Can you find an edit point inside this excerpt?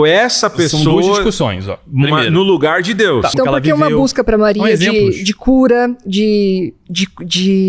yes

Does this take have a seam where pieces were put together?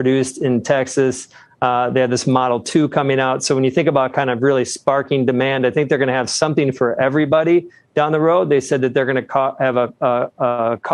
no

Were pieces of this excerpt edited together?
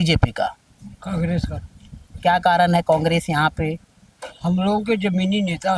no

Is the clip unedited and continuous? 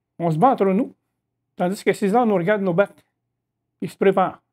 yes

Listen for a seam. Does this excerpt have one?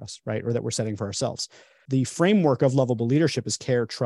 yes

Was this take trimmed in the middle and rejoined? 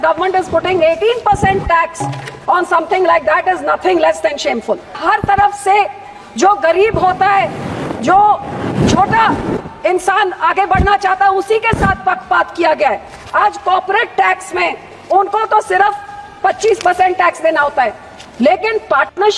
yes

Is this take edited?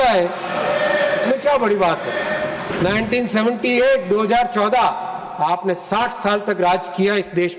yes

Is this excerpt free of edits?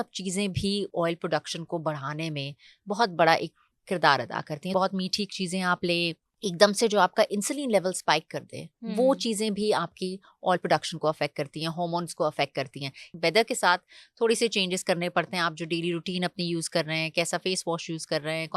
no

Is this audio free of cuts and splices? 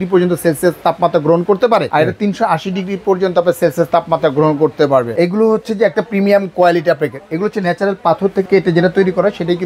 no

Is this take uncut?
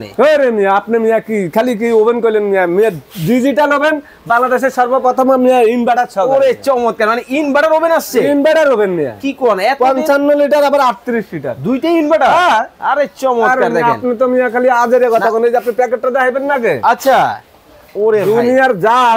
yes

